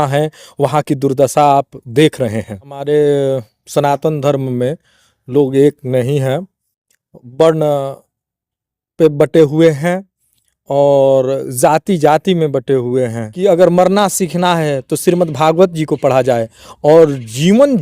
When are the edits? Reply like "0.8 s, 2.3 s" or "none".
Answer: 2.8 s, 13.2 s

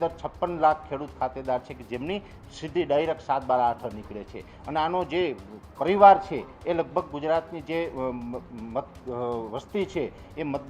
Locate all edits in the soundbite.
none

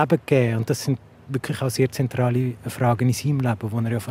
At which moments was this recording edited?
none

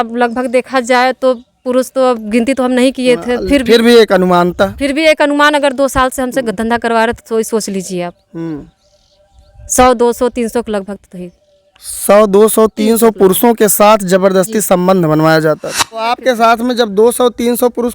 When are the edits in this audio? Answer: 16.2 s

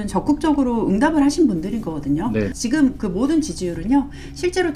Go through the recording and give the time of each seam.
2.5 s

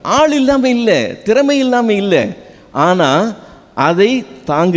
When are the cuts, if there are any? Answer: none

